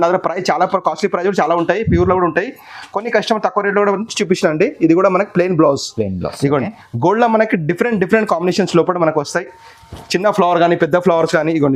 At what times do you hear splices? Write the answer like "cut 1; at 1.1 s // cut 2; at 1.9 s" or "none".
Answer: none